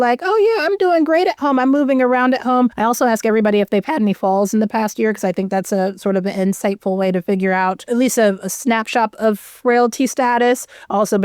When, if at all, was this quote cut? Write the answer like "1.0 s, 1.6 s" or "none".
2.8 s, 7.8 s